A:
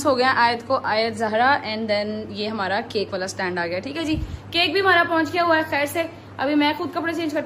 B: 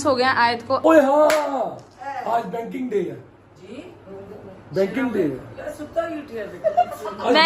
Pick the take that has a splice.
B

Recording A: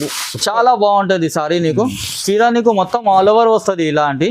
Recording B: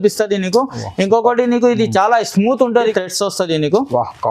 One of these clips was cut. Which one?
B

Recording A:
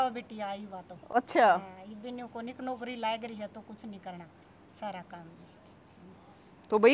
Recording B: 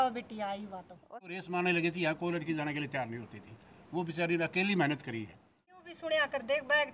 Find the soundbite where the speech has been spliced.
B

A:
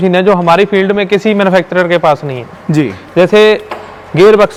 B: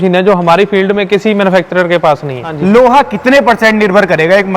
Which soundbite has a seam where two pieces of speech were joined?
B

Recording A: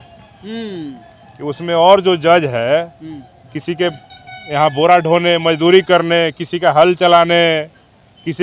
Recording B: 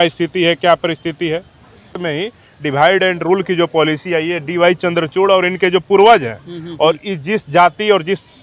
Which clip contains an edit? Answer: B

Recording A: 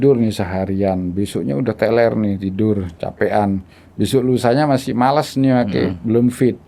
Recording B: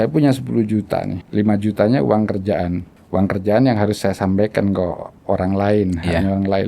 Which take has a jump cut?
B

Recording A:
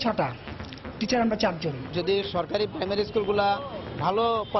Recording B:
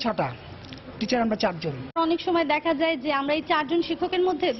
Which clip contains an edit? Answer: A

